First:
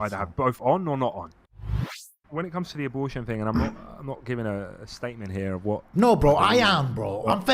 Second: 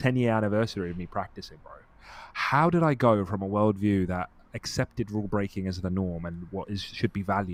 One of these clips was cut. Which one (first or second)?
first